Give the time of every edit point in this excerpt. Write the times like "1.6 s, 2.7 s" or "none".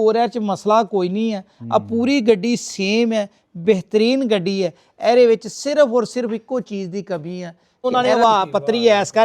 7.8 s